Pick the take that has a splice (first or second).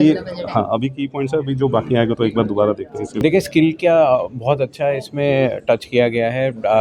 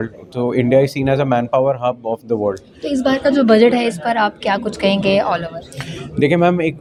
first